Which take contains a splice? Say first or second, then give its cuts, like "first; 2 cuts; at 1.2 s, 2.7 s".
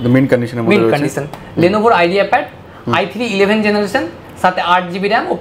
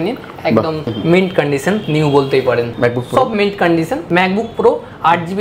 second; 4 cuts; at 0.9 s, 1.8 s, 2.7 s, 4.0 s